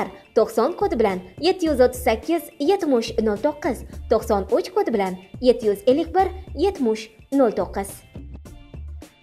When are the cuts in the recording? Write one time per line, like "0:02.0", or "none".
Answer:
0:07.9